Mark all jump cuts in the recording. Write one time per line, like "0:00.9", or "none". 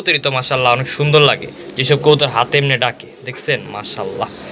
none